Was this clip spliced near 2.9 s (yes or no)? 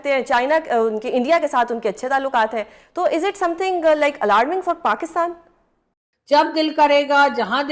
no